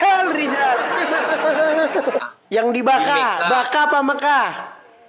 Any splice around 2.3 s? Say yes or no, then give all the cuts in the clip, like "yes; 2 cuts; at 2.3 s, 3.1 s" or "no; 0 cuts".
yes; 1 cut; at 2.3 s